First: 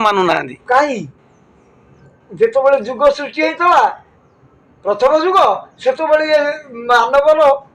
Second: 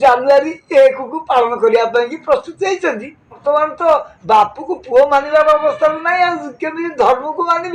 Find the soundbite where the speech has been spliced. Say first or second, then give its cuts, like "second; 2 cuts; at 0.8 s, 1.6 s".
second; 1 cut; at 3.4 s